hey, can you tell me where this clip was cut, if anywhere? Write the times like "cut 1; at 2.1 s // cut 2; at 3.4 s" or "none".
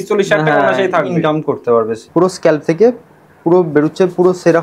cut 1; at 2.0 s